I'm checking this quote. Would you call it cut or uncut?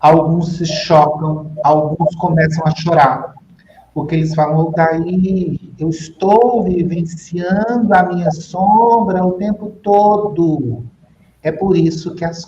uncut